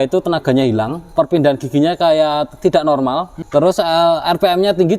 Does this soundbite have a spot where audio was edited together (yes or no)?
yes